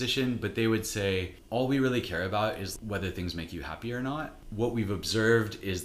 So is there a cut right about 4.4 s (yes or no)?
yes